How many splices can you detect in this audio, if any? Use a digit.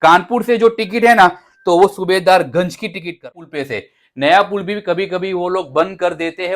1